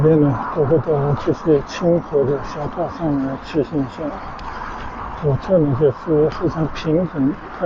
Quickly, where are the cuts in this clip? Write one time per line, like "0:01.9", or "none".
none